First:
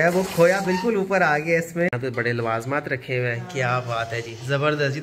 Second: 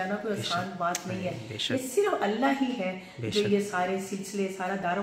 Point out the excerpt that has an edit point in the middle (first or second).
first